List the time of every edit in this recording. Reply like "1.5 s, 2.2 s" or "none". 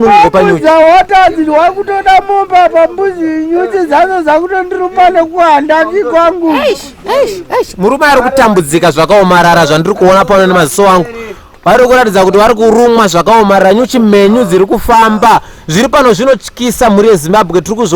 none